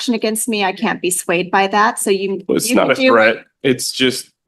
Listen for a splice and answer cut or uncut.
uncut